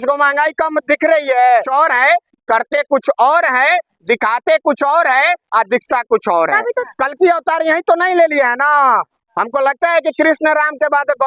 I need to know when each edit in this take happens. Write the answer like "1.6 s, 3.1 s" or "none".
1.7 s, 6.7 s

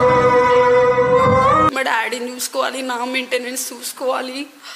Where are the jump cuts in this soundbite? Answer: 1.7 s

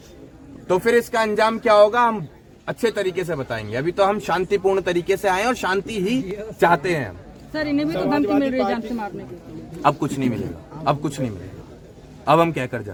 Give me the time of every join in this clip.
none

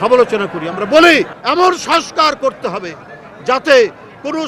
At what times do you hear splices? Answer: 1.4 s

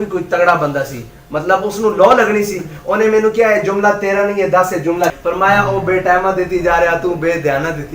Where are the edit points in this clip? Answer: 5.2 s

